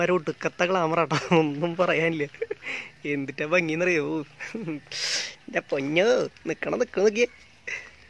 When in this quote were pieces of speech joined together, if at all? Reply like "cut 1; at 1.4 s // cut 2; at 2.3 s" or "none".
none